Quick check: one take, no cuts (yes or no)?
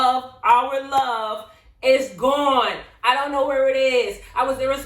yes